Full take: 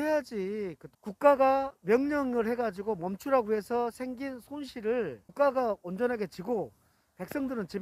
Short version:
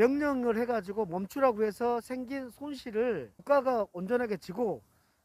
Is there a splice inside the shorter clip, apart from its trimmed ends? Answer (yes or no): no